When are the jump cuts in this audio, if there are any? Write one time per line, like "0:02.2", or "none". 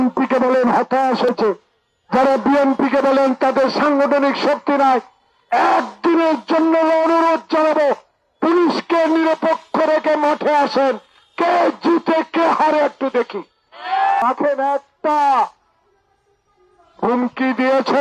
0:01.3
0:14.2